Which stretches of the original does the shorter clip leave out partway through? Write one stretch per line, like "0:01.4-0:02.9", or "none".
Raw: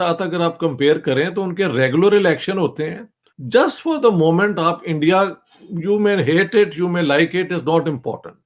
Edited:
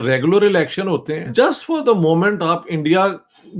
0:02.9-0:03.3